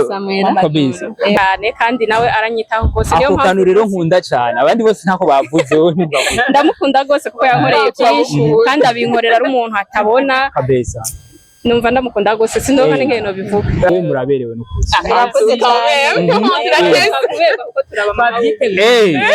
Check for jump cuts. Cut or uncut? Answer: cut